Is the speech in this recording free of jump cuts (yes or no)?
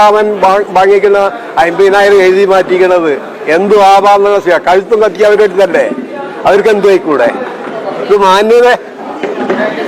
yes